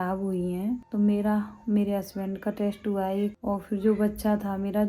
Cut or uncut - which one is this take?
cut